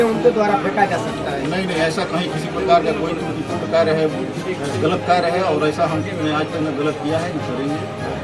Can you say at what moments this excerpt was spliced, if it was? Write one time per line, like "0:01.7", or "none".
none